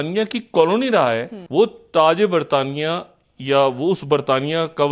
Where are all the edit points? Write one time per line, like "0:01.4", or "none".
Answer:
0:01.4